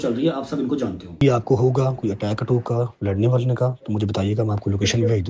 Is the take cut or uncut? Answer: cut